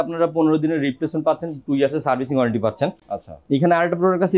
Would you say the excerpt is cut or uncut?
uncut